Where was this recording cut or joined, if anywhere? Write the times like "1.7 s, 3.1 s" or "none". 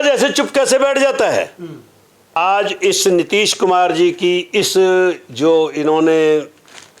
2.4 s